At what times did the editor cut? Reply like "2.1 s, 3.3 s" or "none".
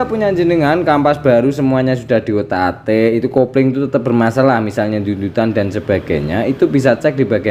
none